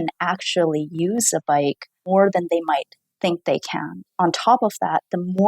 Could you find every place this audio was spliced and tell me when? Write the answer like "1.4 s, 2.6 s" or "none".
1.9 s, 4.1 s